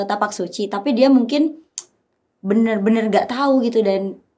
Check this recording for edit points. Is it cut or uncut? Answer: uncut